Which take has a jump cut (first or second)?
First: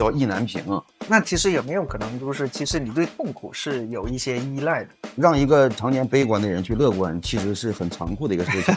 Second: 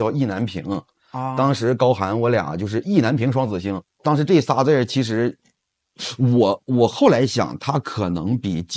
first